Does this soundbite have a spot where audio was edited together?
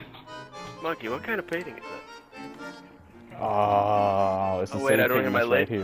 yes; 2 cuts; at 1.8 s, 3.1 s

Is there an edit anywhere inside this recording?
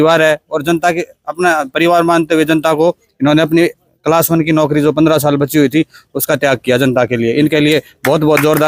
no; 0 cuts

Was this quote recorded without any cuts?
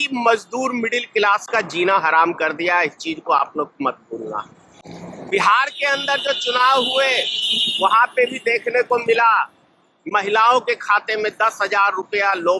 yes; 0 cuts

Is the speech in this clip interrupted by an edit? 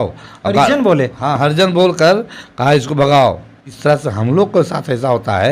yes; 1 cut; at 3.6 s

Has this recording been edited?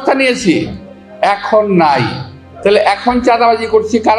no; 0 cuts

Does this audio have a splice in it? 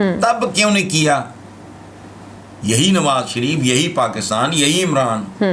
no; 0 cuts

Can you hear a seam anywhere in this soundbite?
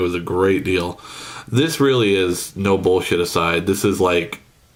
no; 0 cuts

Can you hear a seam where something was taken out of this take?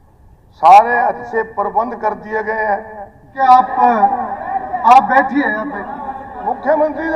yes; 1 cut; at 3.4 s

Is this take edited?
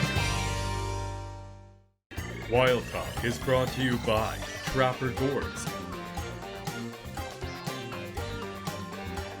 yes; 1 cut; at 1.6 s

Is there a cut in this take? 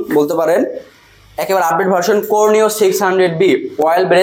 no; 0 cuts

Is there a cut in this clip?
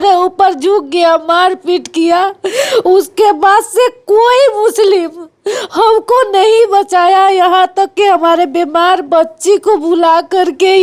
no; 0 cuts

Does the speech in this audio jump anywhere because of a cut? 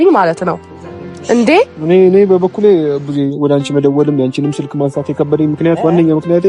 no; 0 cuts

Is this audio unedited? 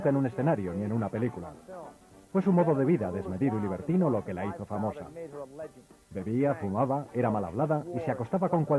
no; 1 cut; at 2.1 s

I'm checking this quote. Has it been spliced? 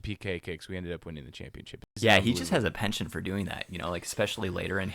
yes; 1 cut; at 2.0 s

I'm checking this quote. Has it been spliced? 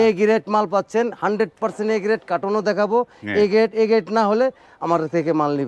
no; 0 cuts

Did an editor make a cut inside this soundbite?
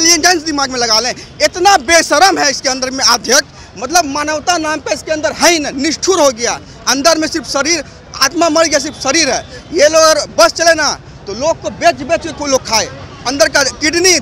no; 0 cuts

